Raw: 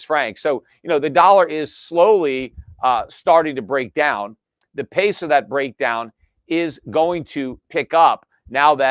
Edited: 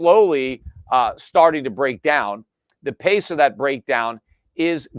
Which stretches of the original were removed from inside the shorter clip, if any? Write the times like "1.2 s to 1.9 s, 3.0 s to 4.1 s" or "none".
none